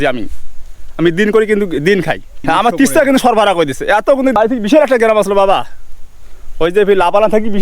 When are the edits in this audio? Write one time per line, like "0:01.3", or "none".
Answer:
0:02.4
0:04.1

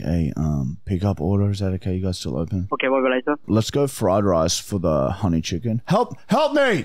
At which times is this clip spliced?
0:02.7
0:03.5

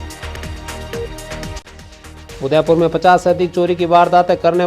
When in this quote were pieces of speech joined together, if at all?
0:01.4

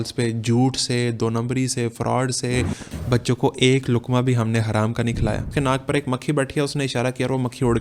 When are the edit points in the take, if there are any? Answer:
0:02.9
0:05.5

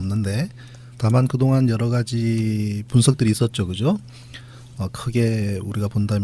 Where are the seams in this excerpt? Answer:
0:03.3

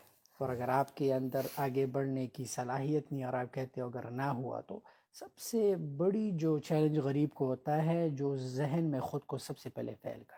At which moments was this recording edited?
none

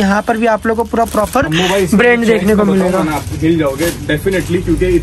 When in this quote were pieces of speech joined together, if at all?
none

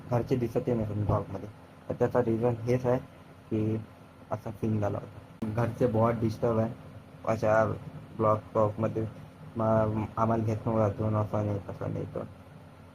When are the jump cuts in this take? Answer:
0:05.4

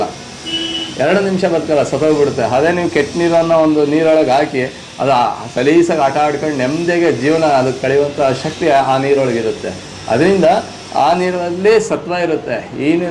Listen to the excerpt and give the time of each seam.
none

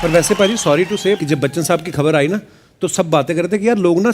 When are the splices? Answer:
0:01.2

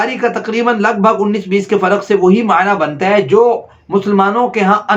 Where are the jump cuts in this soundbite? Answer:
none

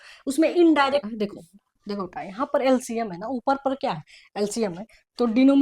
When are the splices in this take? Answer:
0:01.0

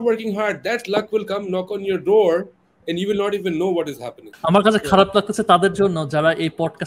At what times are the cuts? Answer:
0:04.2

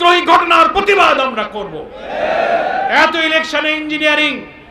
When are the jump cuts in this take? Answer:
0:02.8

